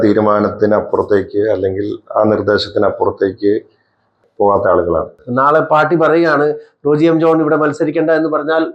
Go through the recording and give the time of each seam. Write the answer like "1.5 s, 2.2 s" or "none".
4.2 s, 5.2 s